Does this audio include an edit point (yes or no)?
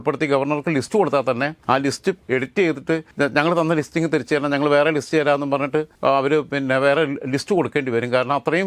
yes